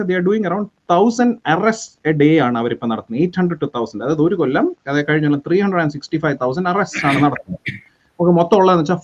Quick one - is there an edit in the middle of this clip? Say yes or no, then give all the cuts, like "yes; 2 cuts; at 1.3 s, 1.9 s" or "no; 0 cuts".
no; 0 cuts